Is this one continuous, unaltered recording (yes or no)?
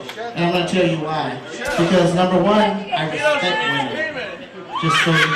no